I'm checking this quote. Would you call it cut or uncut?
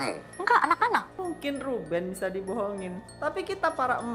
cut